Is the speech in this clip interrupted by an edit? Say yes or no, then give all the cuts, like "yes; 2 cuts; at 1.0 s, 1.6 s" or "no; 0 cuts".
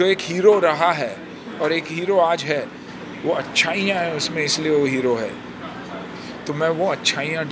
no; 0 cuts